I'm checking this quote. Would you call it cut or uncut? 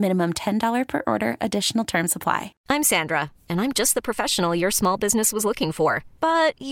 cut